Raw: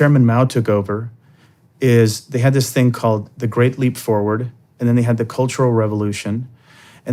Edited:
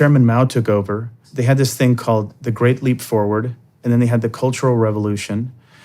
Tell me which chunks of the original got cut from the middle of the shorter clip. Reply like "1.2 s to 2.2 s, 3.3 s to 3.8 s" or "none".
1.3 s to 2.2 s